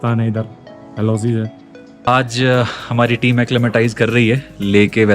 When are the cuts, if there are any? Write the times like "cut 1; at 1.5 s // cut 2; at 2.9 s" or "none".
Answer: cut 1; at 2.1 s